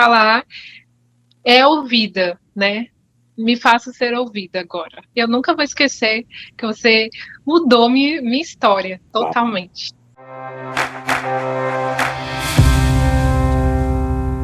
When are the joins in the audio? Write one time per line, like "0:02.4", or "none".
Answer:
0:05.1
0:09.0